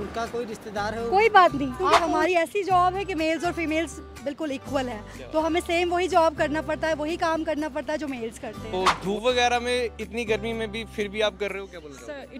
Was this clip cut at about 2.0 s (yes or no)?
yes